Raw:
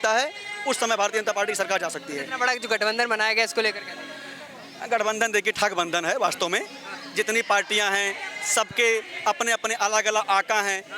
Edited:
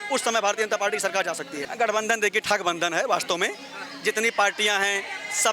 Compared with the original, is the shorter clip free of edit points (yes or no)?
no